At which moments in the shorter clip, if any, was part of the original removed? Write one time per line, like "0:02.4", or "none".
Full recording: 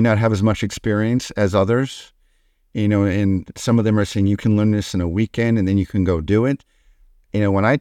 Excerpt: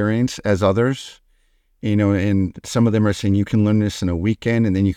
none